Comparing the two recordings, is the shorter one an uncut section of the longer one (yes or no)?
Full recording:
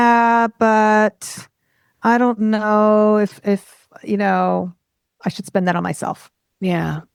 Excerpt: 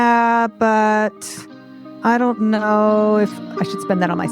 no